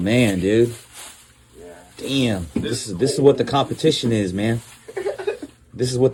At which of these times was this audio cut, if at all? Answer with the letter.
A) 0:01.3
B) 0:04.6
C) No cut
C